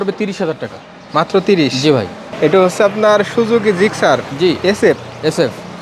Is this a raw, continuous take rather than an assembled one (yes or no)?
no